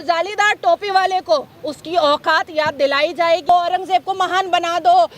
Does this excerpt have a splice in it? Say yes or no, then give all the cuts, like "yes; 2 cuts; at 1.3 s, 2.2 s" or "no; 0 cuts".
yes; 1 cut; at 3.5 s